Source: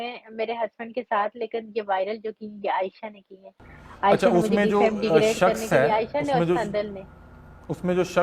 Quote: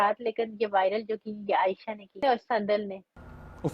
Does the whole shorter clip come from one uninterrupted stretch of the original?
no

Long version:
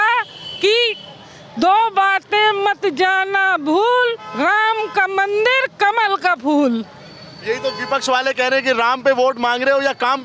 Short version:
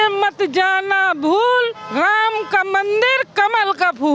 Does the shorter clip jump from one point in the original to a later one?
no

